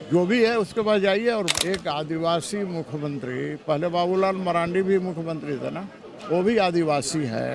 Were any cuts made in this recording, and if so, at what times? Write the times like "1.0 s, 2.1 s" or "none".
1.5 s